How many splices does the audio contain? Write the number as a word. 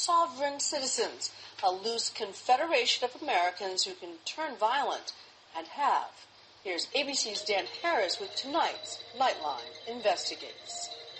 zero